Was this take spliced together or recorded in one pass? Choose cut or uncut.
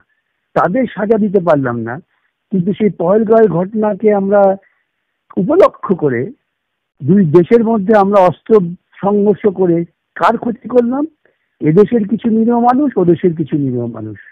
uncut